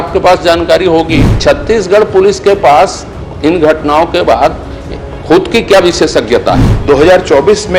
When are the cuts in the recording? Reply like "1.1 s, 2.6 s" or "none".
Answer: 1.3 s, 6.7 s